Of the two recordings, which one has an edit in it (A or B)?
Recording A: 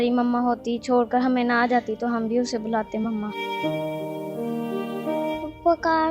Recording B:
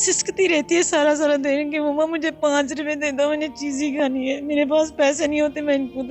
A